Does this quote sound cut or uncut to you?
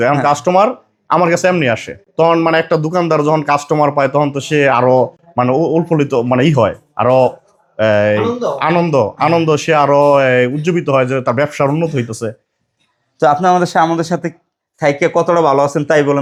uncut